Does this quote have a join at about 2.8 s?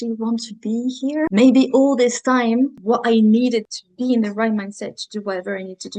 yes; 3 cuts; at 1.3 s, 2.8 s, 3.8 s

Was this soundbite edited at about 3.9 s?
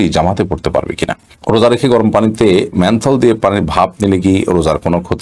no; 1 cut; at 1.3 s

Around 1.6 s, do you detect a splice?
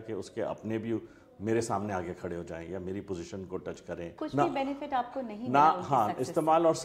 no; 1 cut; at 4.1 s

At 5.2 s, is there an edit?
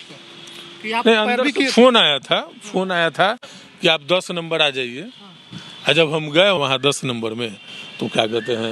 no; 1 cut; at 6.6 s

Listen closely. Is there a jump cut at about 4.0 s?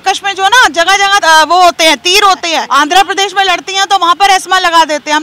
no; 2 cuts; at 1.2 s, 2.6 s

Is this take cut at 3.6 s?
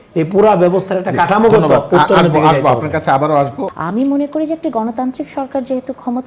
yes; 1 cut; at 3.6 s

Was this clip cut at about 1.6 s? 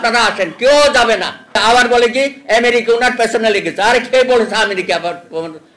yes; 1 cut; at 1.6 s

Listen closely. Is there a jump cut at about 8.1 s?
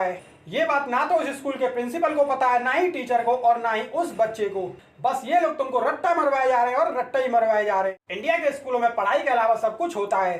yes; 1 cut; at 8.1 s

